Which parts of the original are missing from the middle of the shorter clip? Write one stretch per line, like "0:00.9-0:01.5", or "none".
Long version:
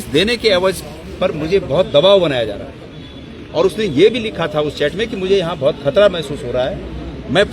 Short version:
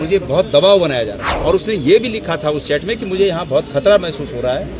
0:02.7-0:03.4